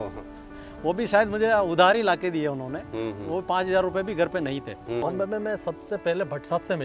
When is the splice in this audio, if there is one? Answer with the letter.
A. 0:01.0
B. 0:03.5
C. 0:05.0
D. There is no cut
C